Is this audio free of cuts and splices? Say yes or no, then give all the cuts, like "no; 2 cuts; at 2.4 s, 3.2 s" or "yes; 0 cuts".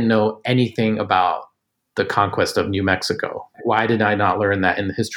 no; 1 cut; at 3.4 s